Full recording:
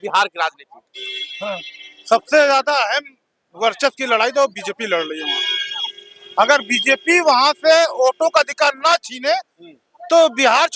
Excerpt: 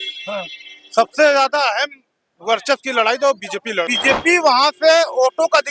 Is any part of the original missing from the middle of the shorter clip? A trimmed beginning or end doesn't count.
yes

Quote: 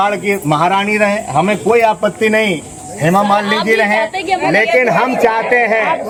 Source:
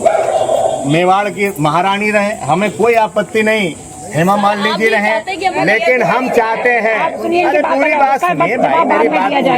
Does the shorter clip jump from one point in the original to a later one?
no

